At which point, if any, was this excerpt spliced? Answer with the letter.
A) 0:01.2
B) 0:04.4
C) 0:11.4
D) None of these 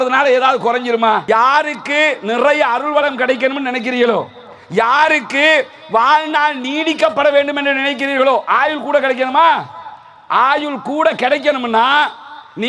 A